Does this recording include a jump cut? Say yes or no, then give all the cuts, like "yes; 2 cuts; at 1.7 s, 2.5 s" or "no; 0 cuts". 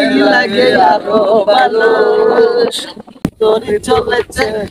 no; 0 cuts